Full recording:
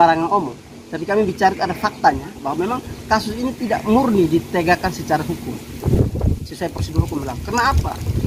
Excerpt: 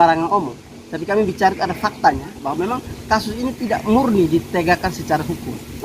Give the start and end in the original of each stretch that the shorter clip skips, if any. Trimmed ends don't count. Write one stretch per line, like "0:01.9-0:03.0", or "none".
none